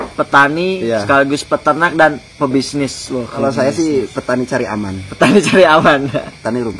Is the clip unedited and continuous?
no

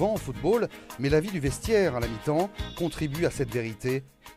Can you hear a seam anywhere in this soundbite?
no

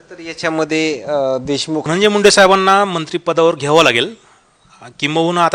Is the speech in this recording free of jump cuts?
no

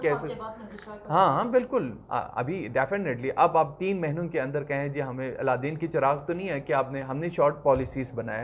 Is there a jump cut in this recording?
no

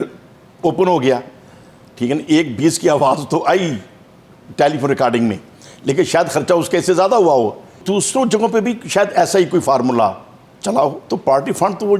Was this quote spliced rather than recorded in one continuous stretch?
yes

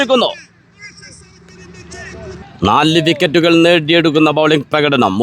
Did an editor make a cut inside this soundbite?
yes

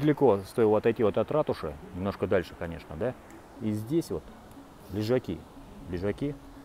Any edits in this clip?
no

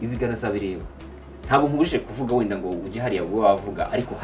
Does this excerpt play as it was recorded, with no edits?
yes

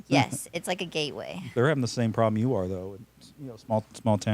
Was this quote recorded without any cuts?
no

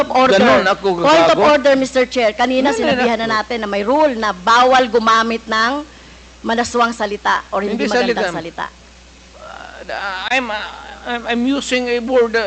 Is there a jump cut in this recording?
no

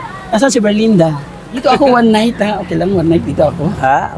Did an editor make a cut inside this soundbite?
yes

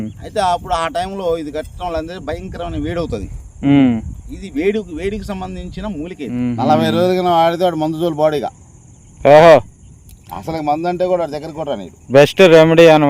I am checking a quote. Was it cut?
yes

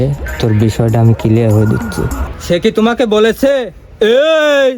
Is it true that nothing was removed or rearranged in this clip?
no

